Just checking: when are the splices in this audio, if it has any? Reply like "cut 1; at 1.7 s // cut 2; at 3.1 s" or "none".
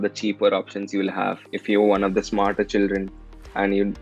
cut 1; at 1.5 s